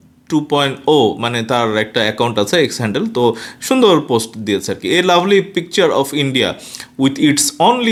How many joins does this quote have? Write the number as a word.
zero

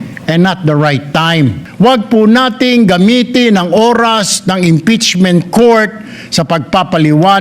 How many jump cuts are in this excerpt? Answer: one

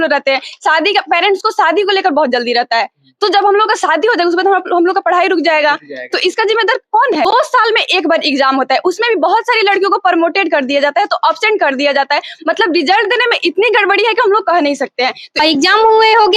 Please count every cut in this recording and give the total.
two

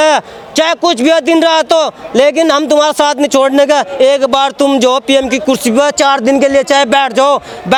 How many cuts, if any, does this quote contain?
zero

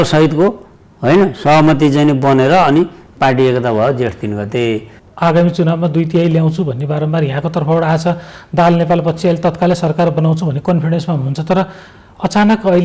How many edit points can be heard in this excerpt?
one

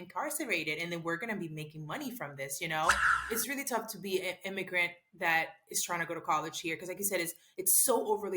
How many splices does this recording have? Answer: one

